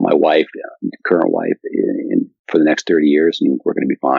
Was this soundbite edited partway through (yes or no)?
yes